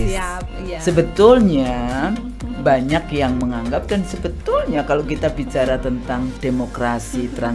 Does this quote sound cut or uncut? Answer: uncut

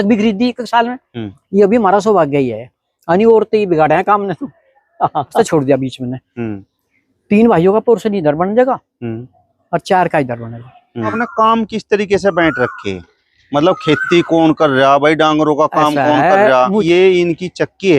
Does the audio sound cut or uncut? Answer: cut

